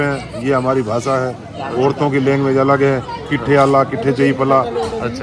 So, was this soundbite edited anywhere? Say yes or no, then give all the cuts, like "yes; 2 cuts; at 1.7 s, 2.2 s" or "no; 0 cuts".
no; 0 cuts